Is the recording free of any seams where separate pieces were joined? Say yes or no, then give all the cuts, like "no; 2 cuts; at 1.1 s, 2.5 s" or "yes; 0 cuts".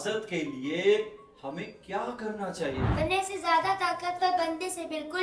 no; 1 cut; at 2.9 s